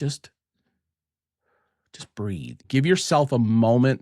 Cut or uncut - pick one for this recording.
cut